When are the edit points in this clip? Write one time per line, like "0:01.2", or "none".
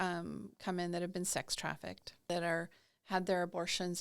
0:02.3

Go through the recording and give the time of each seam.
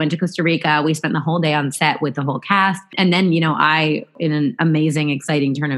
none

